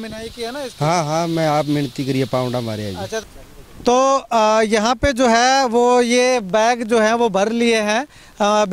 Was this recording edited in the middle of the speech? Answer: yes; 1 cut; at 3.2 s

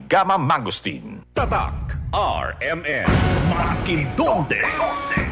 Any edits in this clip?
no; 0 cuts

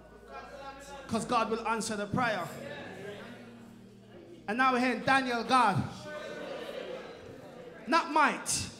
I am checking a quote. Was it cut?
no; 0 cuts

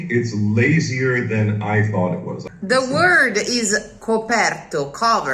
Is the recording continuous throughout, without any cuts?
no; 1 cut; at 2.4 s

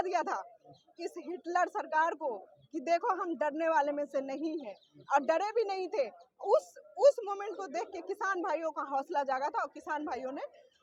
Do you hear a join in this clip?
no; 0 cuts

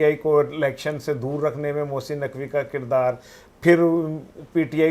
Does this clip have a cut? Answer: no; 0 cuts

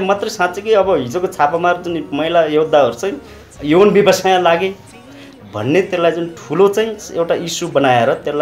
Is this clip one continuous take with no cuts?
yes; 0 cuts

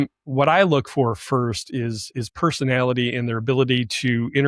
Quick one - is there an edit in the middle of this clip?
no; 0 cuts

